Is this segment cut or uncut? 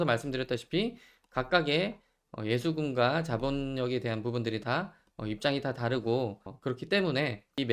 uncut